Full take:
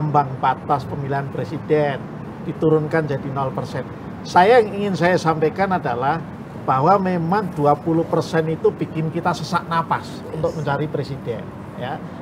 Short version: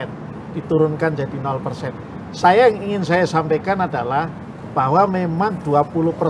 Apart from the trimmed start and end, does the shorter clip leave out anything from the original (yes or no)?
no